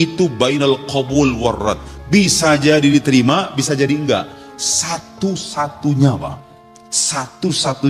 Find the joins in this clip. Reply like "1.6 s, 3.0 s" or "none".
1.9 s